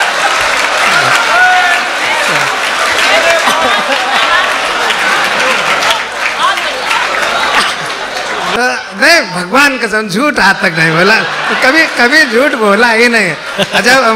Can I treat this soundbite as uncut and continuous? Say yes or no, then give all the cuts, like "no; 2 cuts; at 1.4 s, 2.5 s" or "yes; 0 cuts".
no; 1 cut; at 8.5 s